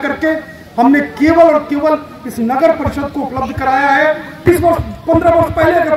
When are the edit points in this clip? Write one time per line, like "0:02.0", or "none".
0:04.5